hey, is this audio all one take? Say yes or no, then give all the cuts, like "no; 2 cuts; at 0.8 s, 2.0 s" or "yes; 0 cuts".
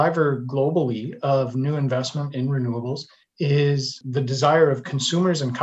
no; 2 cuts; at 3.2 s, 4.0 s